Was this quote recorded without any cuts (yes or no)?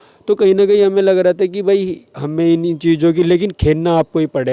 yes